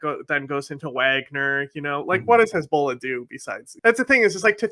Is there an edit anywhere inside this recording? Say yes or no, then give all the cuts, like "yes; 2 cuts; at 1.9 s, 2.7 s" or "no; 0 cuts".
yes; 1 cut; at 3.6 s